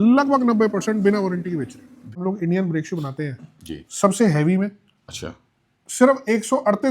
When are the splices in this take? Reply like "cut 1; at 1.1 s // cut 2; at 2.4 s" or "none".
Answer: cut 1; at 2.1 s